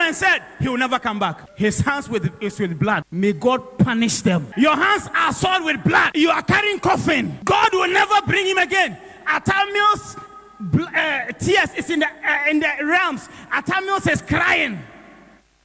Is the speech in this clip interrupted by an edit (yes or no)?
yes